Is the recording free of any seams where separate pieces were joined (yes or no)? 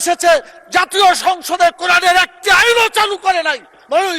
yes